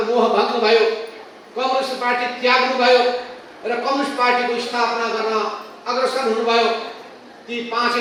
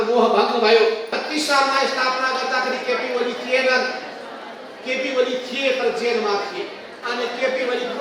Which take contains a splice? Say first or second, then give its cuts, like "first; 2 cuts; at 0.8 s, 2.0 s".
second; 2 cuts; at 1.1 s, 6.9 s